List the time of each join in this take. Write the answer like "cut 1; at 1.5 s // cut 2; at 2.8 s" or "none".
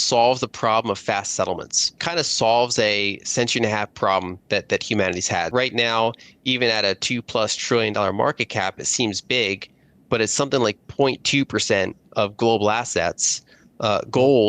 cut 1; at 2.0 s // cut 2; at 5.5 s